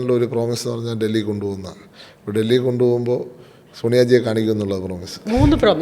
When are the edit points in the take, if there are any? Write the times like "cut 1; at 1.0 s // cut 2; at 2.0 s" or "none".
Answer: none